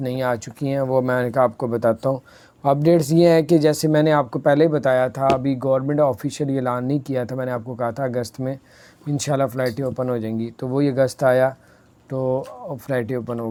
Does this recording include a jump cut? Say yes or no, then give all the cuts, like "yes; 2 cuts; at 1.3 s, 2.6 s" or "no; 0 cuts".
no; 0 cuts